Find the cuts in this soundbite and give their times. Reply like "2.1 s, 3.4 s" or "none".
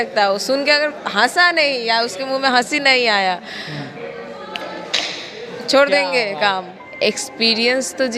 6.8 s